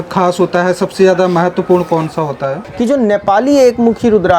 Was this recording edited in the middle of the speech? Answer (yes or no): yes